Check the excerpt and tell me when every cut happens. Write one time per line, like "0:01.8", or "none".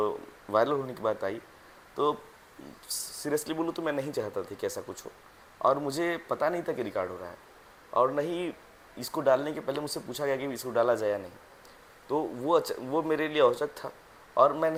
none